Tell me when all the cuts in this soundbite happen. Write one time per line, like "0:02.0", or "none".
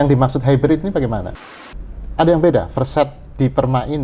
0:01.4